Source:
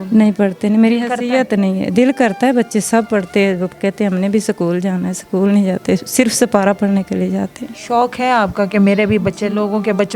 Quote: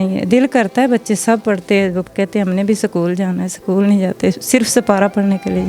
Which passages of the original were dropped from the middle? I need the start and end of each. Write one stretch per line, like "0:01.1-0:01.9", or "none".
none